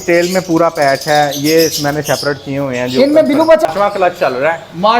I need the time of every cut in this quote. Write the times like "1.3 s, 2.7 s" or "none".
3.6 s